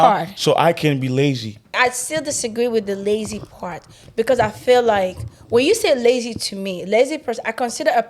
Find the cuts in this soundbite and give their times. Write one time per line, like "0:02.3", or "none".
0:01.8